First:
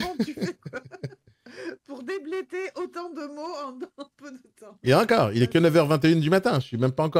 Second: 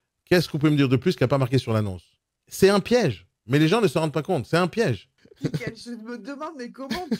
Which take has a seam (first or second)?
second